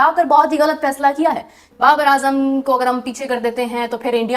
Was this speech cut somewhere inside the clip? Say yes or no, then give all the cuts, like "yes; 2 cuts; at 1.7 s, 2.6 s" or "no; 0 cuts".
yes; 1 cut; at 1.7 s